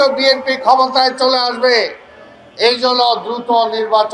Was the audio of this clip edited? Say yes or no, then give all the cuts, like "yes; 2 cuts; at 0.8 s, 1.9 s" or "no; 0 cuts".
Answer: no; 0 cuts